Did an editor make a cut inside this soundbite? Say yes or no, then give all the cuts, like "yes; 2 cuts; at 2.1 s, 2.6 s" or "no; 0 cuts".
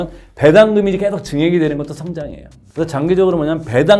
no; 0 cuts